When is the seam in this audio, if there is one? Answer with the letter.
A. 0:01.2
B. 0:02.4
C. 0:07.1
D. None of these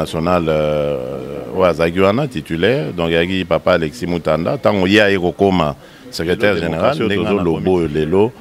C